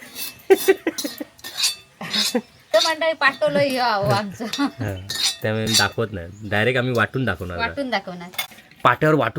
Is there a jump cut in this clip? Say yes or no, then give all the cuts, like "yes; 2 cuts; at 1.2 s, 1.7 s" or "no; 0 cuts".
yes; 1 cut; at 8.3 s